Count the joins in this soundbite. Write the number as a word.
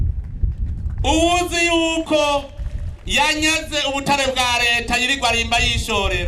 zero